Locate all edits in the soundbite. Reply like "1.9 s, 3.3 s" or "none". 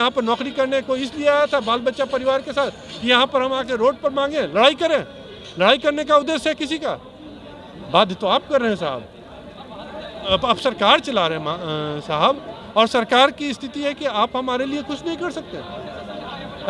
10.3 s